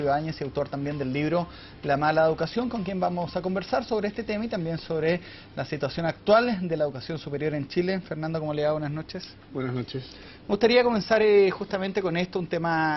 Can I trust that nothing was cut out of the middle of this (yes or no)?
yes